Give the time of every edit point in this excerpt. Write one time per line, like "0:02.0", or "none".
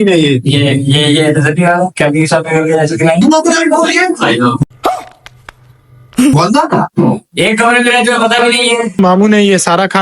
0:03.2
0:09.0